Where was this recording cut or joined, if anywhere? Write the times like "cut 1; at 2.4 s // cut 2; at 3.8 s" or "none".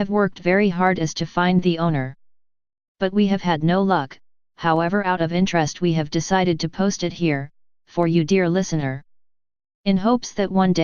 cut 1; at 5.3 s